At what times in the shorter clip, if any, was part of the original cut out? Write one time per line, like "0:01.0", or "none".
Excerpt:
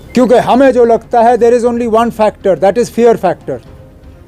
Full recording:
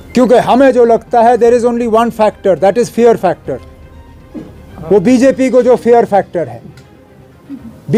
none